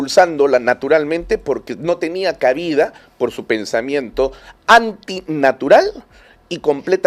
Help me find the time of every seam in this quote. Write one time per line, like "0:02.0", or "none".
none